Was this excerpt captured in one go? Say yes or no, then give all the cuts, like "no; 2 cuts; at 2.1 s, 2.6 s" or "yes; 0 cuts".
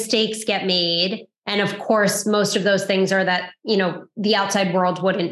yes; 0 cuts